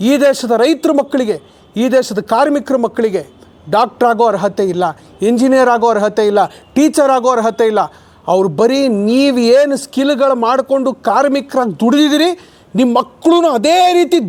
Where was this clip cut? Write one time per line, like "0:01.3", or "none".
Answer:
none

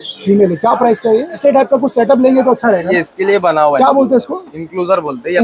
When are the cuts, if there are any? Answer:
0:01.4

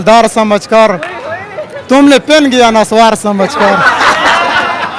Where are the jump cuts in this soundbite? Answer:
none

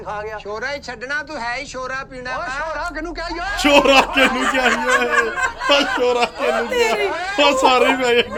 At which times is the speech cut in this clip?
none

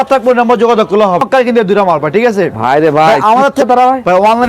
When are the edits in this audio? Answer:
0:01.2
0:03.6

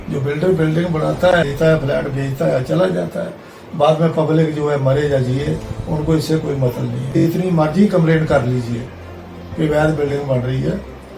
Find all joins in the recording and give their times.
0:01.5
0:07.2

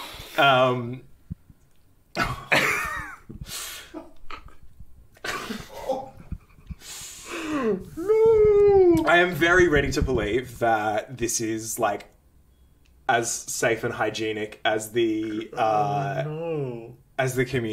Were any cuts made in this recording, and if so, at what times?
none

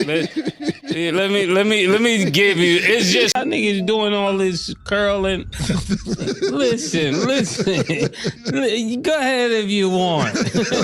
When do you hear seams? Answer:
0:03.3

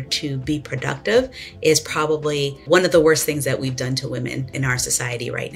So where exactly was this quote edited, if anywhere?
0:02.6
0:04.5

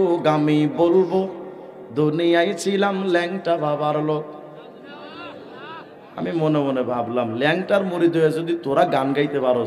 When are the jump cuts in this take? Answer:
none

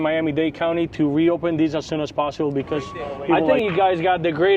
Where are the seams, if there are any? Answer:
0:03.4

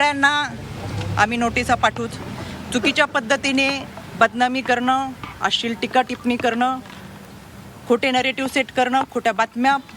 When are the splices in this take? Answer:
none

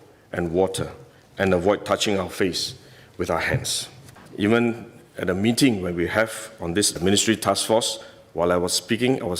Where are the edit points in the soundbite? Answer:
0:04.2

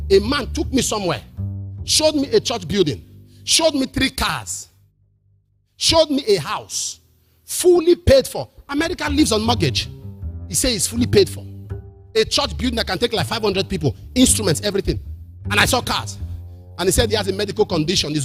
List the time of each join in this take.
none

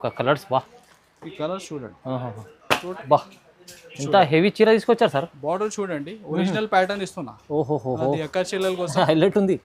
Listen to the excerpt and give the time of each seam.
0:02.9

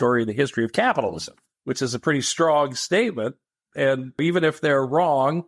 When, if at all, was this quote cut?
0:04.2

